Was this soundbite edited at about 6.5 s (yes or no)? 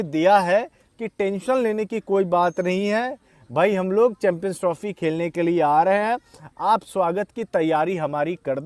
no